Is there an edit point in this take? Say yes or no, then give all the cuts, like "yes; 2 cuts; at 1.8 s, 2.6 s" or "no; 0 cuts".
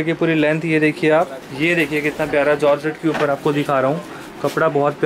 yes; 1 cut; at 1.4 s